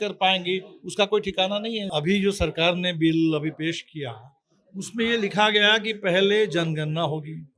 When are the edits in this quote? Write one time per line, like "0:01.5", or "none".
0:01.9